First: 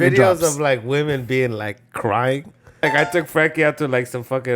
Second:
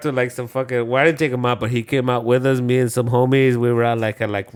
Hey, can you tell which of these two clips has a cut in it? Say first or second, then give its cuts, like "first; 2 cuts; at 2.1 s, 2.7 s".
first; 1 cut; at 2.8 s